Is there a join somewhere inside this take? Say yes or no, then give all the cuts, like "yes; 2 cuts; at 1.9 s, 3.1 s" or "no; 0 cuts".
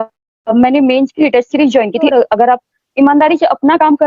yes; 1 cut; at 2.1 s